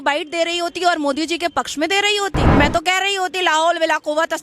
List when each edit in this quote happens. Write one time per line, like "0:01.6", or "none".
0:02.4